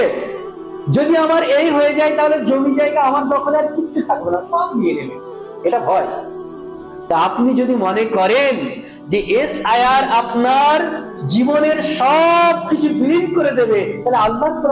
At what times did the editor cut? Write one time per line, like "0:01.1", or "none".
none

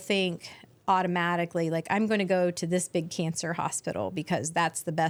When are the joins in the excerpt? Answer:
none

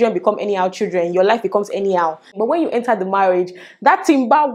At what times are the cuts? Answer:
0:02.3

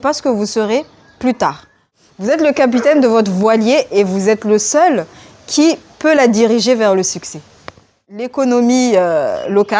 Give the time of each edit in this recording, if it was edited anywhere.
0:02.1
0:08.3

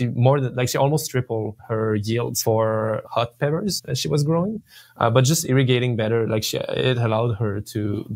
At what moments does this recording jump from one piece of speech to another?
0:01.6
0:02.4
0:03.0
0:03.9

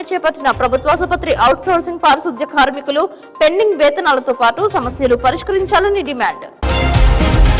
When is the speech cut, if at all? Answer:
0:06.5

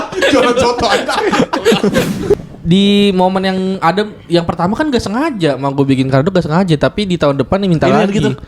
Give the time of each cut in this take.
0:02.3

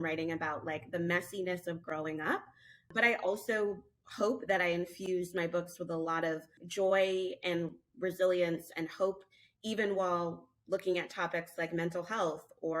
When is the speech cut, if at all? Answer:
0:02.9

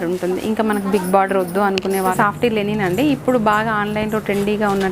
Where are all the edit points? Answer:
0:02.1

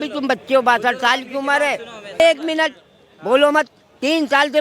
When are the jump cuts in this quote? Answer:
0:02.2

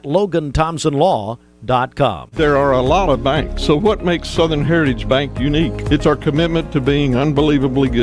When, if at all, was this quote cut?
0:02.3

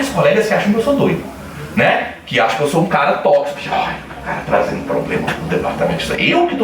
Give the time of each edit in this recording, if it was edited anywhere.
none

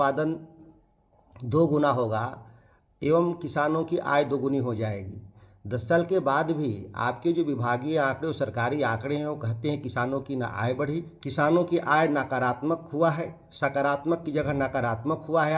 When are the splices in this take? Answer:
0:11.1

